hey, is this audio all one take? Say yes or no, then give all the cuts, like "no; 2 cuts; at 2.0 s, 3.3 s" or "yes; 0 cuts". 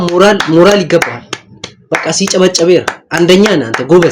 yes; 0 cuts